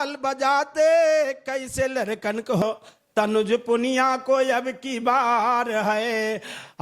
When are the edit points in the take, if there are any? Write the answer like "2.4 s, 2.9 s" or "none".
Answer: 2.6 s